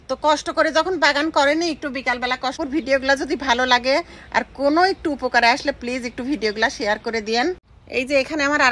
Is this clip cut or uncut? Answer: cut